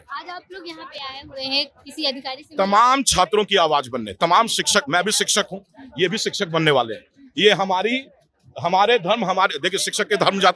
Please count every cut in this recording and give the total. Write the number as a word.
zero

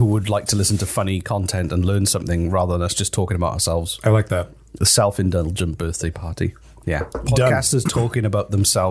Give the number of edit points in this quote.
one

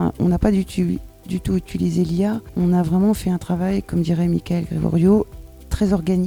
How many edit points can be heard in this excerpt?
zero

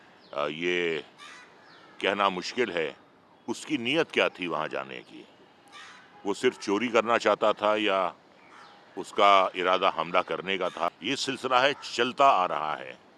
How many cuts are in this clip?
one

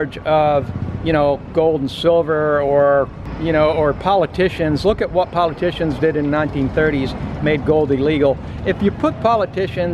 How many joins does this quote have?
one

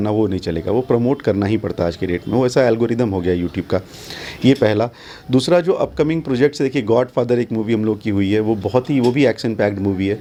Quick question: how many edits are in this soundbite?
zero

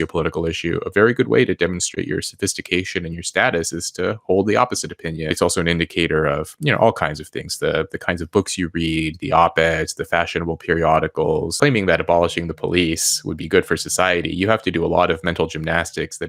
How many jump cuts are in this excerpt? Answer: two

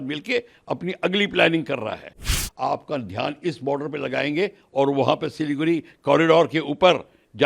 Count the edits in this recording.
one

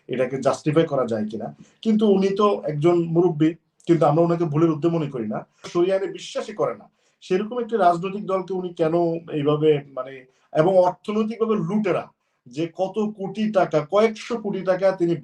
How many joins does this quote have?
one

